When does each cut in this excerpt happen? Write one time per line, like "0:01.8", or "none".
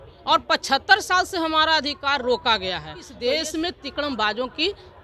0:03.0